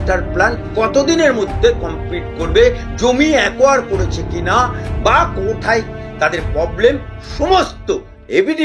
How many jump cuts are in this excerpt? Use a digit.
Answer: 0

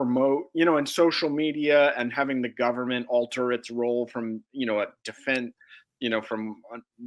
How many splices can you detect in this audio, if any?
0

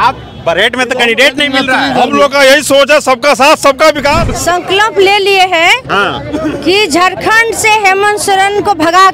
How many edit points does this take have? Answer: 1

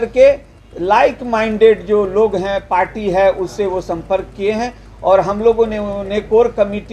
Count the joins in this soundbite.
0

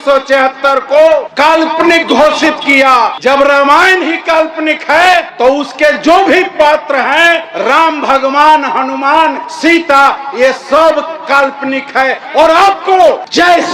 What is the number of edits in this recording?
6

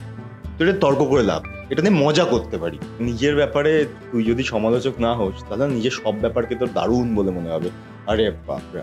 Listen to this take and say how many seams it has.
1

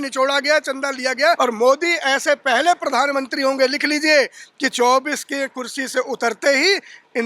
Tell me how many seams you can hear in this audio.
1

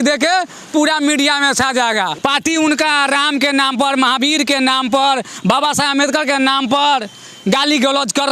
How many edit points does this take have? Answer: 1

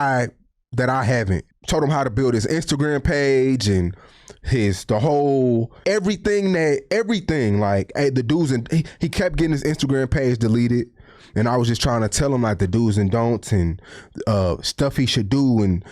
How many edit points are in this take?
2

